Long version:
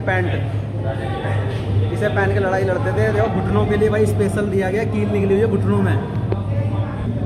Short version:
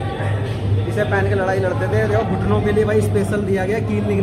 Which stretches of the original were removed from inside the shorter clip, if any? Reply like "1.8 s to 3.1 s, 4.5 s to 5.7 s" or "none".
none